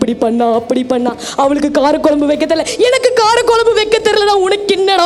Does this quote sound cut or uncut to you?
uncut